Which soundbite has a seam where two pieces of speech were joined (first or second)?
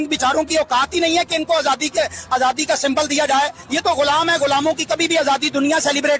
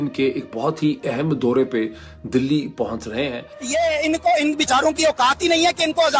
second